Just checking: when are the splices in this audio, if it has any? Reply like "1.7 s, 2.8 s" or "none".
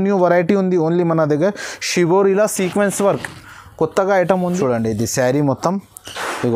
4.5 s